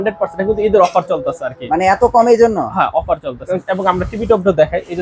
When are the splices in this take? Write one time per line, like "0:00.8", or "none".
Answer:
0:03.5